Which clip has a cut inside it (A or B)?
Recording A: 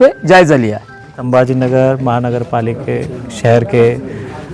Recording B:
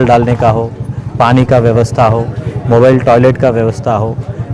A